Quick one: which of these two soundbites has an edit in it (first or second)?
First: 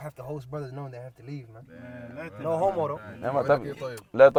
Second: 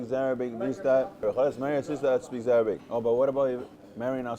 second